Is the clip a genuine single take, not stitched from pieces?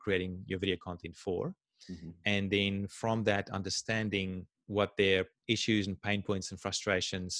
no; 2 cuts; at 4.5 s, 5.3 s

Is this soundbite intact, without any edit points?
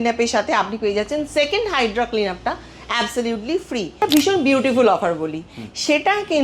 no; 1 cut; at 4.0 s

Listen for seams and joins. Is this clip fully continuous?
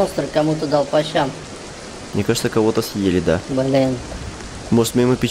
yes; 0 cuts

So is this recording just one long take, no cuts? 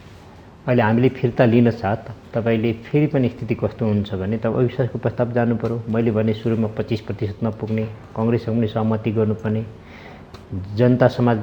yes; 0 cuts

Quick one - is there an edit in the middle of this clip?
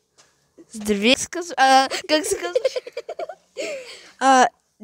yes; 1 cut; at 1.1 s

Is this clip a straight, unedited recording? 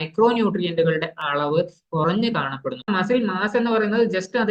no; 1 cut; at 2.8 s

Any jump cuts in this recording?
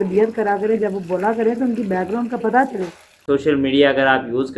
yes; 1 cut; at 3.2 s

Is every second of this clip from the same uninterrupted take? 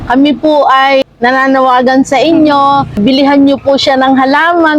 no; 2 cuts; at 1.0 s, 3.0 s

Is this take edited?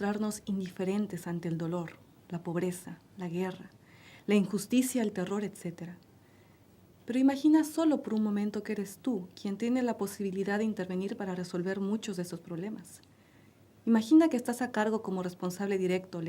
yes; 1 cut; at 10.6 s

